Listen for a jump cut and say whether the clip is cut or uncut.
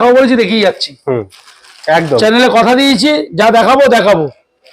uncut